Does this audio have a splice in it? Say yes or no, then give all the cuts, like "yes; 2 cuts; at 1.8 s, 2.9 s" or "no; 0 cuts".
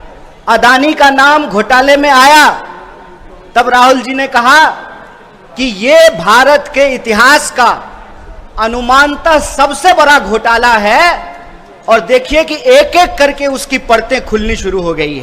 no; 0 cuts